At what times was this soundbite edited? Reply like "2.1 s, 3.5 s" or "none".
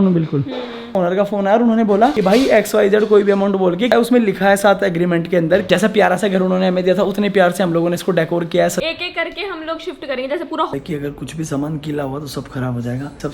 0.9 s, 3.9 s, 5.7 s, 8.8 s, 10.7 s